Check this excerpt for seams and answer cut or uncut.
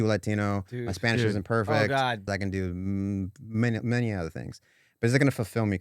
cut